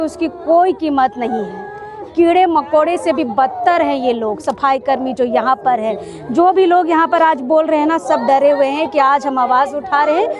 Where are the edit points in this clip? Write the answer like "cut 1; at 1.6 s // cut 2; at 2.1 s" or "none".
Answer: none

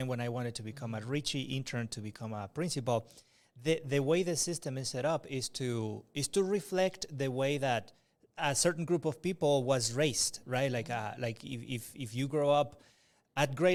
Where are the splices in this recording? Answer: none

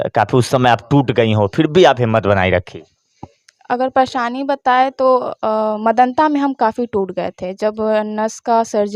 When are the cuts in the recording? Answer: none

